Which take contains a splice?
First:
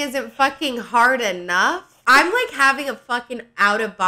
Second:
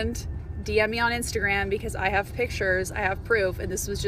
first; 1 cut; at 1.9 s

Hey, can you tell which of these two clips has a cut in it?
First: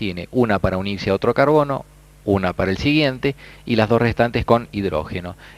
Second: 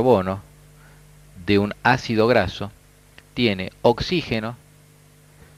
first; 1 cut; at 4.3 s

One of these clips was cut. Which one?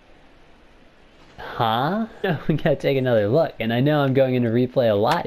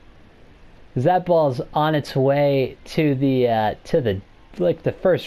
first; 1 cut; at 2.3 s

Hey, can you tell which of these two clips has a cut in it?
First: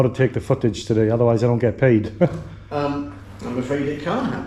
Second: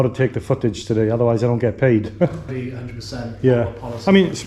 second; 1 cut; at 2.5 s

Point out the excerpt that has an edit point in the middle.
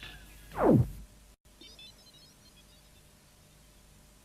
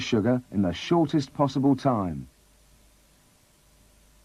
first; 1 cut; at 1.1 s

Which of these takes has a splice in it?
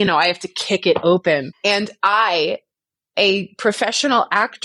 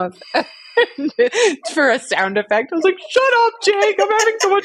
first; 1 cut; at 1.5 s

